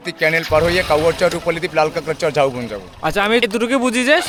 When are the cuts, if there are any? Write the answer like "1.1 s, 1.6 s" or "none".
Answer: none